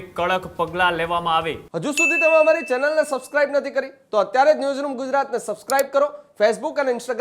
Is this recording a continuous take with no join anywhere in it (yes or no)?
no